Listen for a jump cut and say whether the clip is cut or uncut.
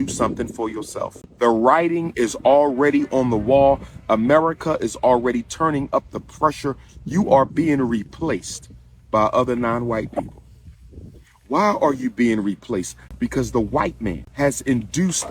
cut